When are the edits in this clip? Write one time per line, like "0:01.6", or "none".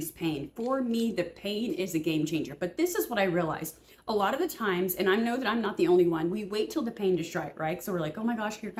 none